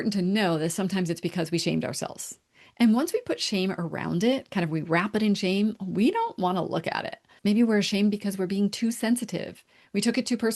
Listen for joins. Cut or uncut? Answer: cut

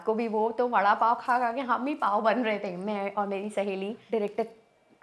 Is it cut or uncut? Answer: cut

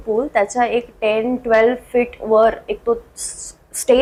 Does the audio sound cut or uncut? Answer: uncut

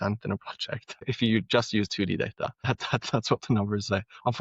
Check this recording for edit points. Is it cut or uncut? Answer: cut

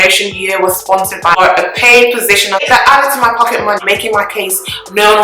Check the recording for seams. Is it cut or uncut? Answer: cut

